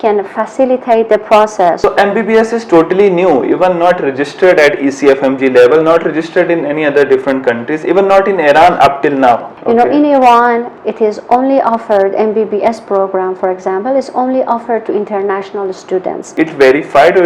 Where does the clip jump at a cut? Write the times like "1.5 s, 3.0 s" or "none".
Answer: 1.8 s, 9.5 s, 16.3 s